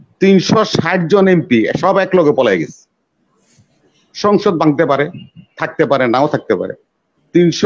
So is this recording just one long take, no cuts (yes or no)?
yes